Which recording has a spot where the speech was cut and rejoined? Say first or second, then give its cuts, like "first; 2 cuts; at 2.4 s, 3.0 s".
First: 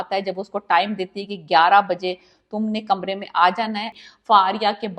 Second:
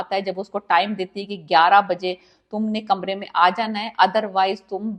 first; 1 cut; at 3.9 s